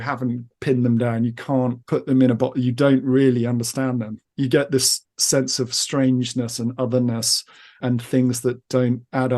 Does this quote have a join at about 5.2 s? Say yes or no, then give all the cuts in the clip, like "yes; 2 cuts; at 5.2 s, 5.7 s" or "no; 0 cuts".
no; 1 cut; at 7.8 s